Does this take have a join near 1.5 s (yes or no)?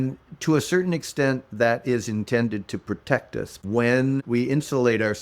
no